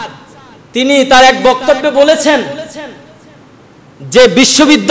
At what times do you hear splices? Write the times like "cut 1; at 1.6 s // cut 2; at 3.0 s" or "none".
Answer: none